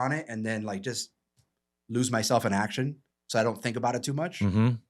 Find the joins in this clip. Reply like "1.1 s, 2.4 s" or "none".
none